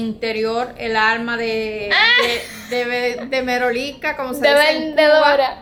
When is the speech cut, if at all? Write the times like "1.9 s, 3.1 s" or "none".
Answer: none